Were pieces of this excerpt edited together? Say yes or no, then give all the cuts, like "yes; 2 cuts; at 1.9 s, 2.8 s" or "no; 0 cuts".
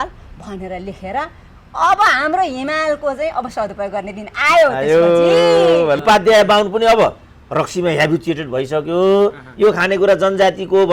yes; 1 cut; at 6.0 s